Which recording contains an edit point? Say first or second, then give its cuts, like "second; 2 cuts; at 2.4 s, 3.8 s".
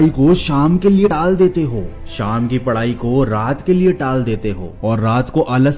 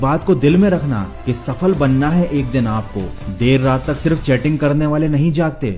first; 1 cut; at 1.1 s